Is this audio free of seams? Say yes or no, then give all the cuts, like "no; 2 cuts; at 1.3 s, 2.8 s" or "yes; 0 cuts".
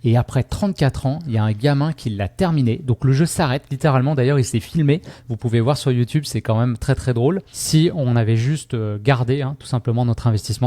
no; 1 cut; at 7.5 s